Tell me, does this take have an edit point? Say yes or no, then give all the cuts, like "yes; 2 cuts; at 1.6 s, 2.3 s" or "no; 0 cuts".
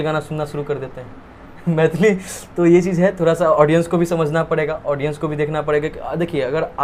no; 0 cuts